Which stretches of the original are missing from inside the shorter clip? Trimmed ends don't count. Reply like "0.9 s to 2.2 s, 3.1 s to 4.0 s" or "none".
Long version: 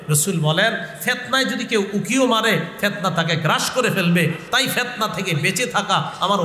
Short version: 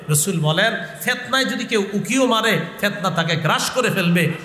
none